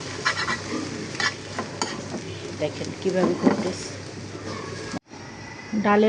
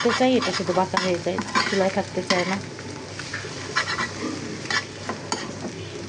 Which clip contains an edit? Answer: first; 1 cut; at 5.0 s

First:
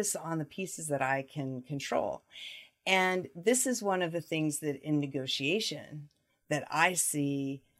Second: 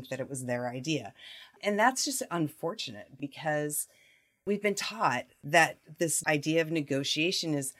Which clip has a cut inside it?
second; 5 cuts; at 1.6 s, 3.2 s, 4.4 s, 5.3 s, 6.2 s

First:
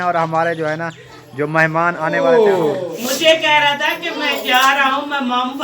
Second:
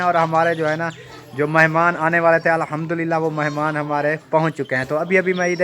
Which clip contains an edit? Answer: first; 1 cut; at 2.2 s

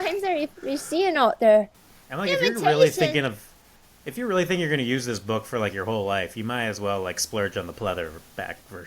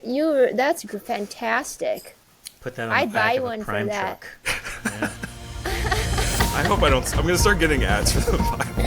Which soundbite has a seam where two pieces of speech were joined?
first; 1 cut; at 1.8 s

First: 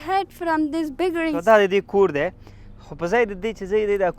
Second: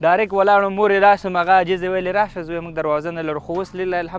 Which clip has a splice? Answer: first; 1 cut; at 1.4 s

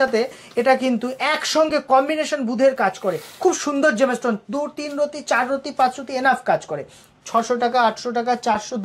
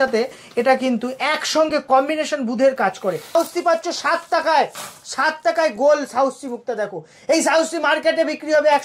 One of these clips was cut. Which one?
second; 1 cut; at 3.3 s

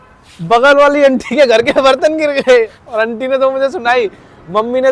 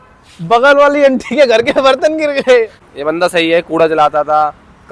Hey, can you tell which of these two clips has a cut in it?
second; 1 cut; at 2.8 s

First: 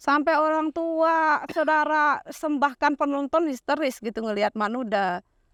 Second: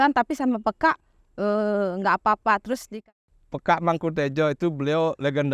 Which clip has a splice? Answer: second; 1 cut; at 2.9 s

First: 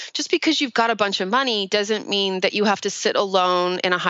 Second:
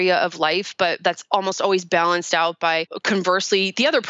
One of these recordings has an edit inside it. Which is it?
second; 1 cut; at 2.9 s

